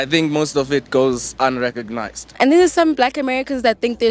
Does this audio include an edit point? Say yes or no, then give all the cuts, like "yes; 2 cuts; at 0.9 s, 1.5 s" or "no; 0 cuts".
yes; 1 cut; at 2.3 s